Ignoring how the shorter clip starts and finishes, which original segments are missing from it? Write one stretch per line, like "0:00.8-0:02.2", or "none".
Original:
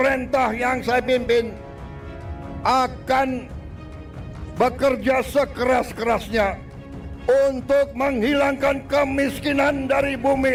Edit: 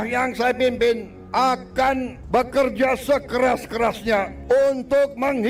0:01.6-0:02.5
0:03.5-0:04.4
0:06.6-0:07.1